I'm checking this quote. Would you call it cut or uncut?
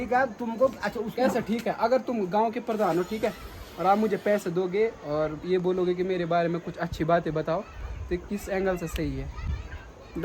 uncut